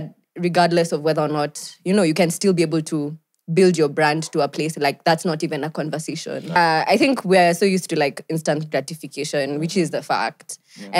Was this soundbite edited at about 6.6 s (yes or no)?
yes